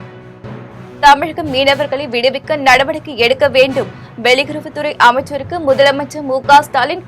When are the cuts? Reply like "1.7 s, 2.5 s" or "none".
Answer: 1.0 s